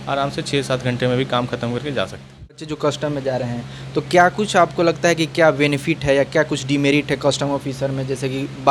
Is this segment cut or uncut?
uncut